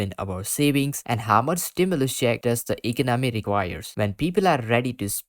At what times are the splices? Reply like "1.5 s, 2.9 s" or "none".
3.9 s

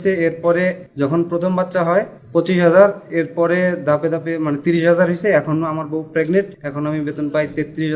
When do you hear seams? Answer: 0.8 s, 2.2 s, 6.6 s

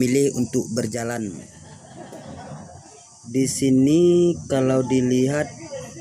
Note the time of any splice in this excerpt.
1.4 s

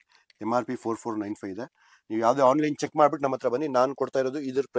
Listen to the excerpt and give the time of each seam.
none

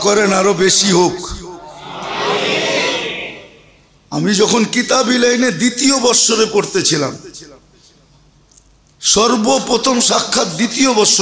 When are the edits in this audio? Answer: none

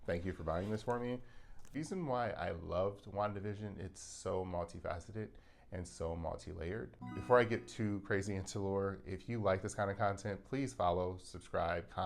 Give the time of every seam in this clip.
1.7 s, 7.0 s

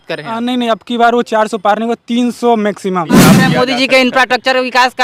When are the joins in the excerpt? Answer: 3.3 s

